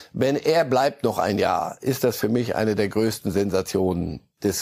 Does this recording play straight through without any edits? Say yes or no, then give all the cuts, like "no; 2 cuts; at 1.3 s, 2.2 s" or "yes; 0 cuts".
yes; 0 cuts